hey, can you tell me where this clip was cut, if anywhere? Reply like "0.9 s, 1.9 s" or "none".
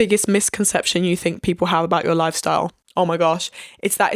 none